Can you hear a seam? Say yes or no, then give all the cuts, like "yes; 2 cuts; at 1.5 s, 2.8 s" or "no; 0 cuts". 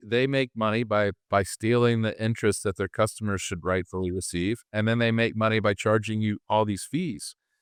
no; 0 cuts